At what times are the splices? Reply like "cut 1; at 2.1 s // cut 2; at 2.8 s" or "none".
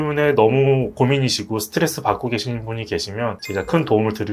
cut 1; at 3.4 s